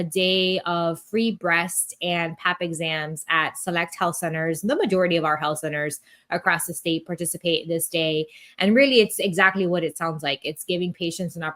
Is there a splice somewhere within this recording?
no; 0 cuts

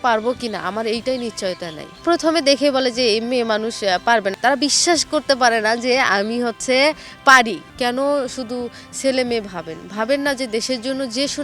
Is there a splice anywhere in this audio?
yes; 2 cuts; at 4.3 s, 7.7 s

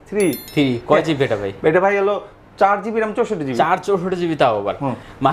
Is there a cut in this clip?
no; 0 cuts

